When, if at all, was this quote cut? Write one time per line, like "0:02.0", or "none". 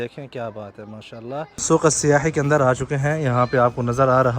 0:01.6